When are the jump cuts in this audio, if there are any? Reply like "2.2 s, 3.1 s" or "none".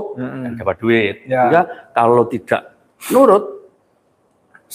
1.5 s